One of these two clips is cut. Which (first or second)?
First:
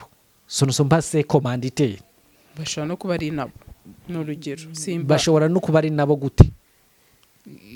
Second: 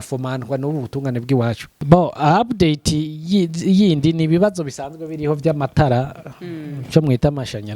second